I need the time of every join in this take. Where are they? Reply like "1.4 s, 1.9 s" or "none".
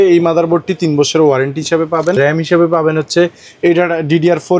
2.2 s